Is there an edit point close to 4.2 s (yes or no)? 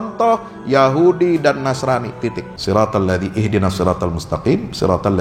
no